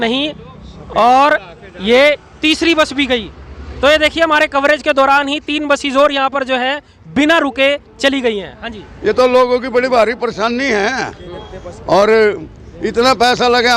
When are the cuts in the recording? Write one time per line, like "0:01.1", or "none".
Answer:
none